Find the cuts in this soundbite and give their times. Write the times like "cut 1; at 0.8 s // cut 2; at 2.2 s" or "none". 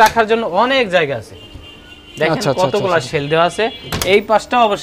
none